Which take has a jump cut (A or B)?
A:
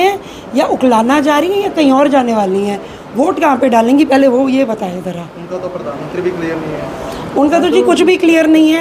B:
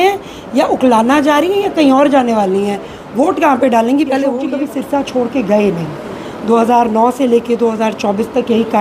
B